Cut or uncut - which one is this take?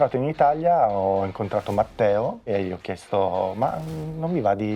cut